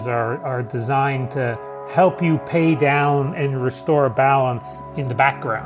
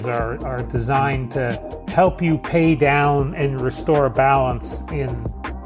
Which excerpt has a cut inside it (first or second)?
first